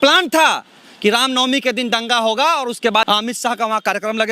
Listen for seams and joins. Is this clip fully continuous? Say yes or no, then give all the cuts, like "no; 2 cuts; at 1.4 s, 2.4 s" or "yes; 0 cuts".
no; 1 cut; at 3.1 s